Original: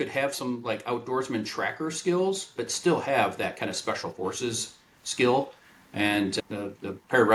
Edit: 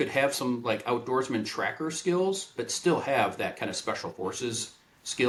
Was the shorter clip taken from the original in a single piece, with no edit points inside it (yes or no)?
yes